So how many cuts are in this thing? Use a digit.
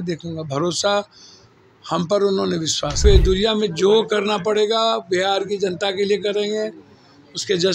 1